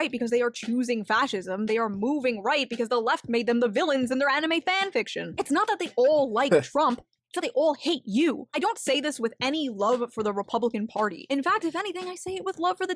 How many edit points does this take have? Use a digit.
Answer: 1